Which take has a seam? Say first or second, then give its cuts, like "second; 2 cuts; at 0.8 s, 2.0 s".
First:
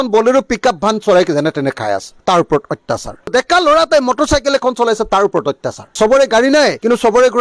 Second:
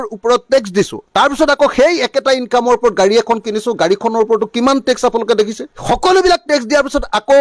first; 1 cut; at 5.9 s